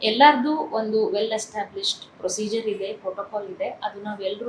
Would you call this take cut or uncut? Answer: uncut